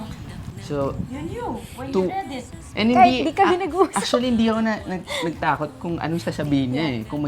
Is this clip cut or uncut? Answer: cut